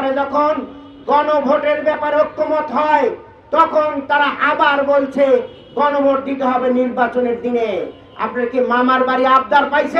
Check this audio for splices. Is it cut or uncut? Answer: uncut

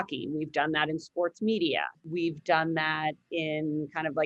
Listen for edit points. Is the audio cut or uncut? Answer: cut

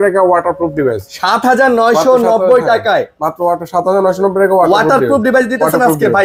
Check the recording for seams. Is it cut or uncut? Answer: uncut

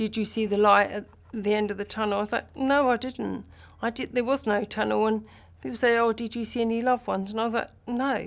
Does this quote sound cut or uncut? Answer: uncut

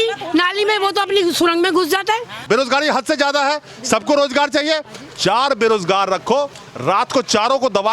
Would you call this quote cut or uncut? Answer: cut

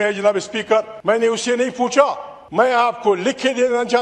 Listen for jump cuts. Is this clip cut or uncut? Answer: cut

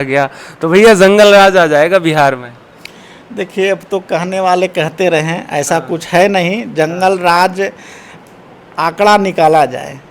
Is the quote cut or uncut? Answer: uncut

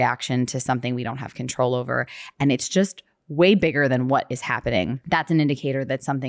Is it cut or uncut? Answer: cut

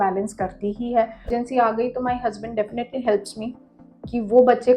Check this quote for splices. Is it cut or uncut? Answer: cut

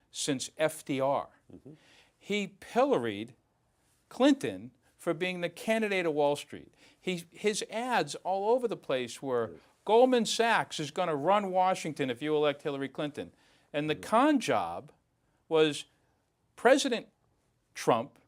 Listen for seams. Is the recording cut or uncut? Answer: uncut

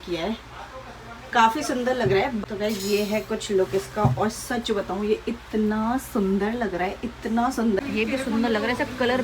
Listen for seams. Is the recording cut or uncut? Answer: cut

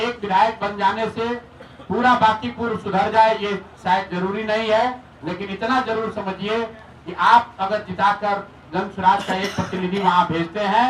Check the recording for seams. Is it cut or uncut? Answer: uncut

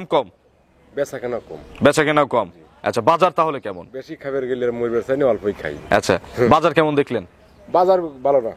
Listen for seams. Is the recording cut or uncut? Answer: uncut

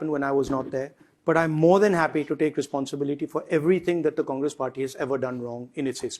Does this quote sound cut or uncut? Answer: uncut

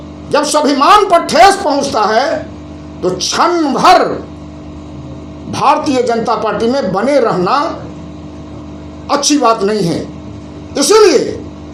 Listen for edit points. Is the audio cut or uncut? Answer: uncut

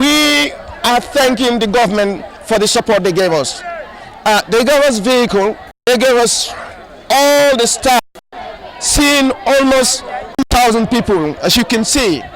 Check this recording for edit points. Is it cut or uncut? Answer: uncut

